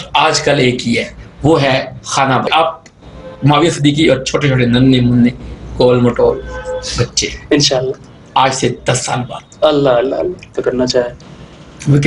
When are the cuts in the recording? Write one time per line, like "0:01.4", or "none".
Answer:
0:02.5
0:10.5